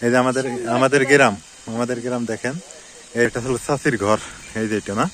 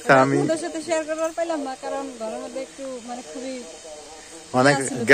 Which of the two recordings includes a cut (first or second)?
first